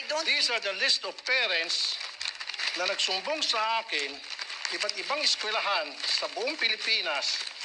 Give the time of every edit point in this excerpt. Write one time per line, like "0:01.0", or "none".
none